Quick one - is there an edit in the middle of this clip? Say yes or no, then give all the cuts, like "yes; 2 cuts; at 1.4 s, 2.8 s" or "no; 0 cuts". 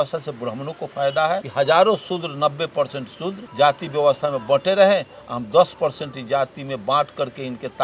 yes; 2 cuts; at 1.5 s, 3.4 s